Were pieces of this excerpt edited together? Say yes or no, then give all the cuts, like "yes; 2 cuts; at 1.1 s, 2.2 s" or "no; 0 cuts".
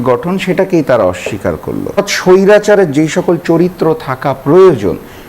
yes; 1 cut; at 2.1 s